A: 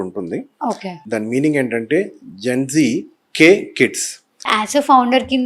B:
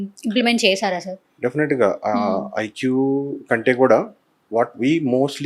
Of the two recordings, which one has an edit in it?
A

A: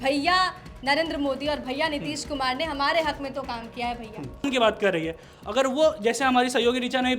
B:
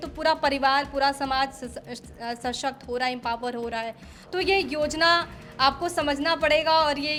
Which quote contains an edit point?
A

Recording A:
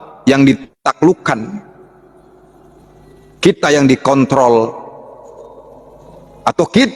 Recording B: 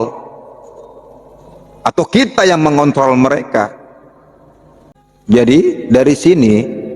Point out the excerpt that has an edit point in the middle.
B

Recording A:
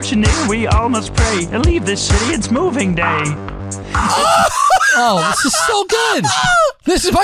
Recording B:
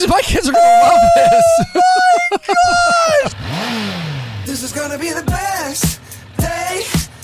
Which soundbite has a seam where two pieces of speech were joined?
B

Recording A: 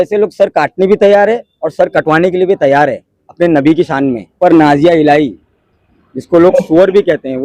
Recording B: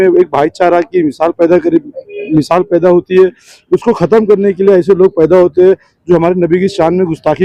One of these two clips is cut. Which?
A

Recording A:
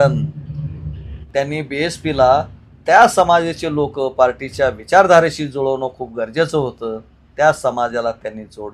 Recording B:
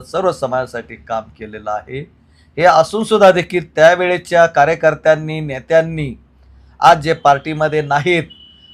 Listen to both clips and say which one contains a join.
A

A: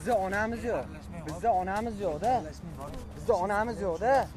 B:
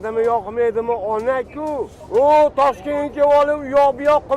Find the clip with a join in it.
B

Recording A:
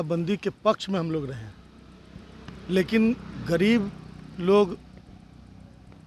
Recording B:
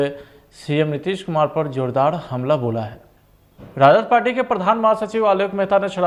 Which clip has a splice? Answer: B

